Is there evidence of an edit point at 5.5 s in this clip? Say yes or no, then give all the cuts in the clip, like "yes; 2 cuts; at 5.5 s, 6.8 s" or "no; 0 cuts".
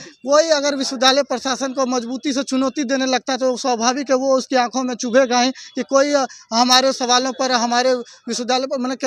no; 0 cuts